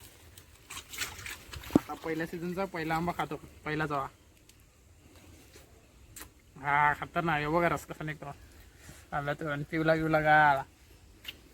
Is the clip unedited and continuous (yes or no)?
yes